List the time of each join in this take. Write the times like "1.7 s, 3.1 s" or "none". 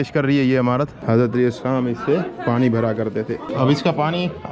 1.0 s, 3.4 s